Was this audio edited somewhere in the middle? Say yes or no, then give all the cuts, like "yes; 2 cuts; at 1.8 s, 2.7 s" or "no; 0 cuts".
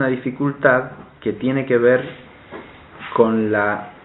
yes; 1 cut; at 2.0 s